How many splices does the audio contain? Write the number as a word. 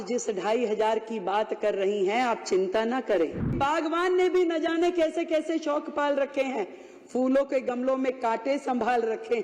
one